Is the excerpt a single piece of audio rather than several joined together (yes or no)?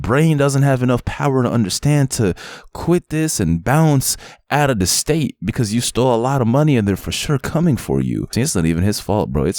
no